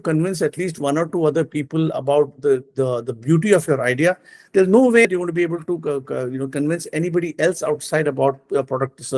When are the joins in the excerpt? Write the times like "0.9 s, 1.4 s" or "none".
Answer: 5.1 s